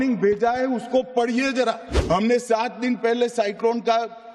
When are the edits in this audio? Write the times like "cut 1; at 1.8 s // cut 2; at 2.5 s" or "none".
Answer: cut 1; at 1.9 s